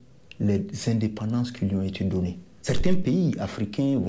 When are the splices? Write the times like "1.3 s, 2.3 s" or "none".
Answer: 2.6 s